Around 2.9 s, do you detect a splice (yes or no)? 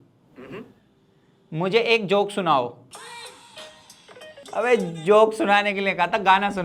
yes